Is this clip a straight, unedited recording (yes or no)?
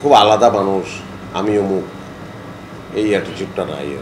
yes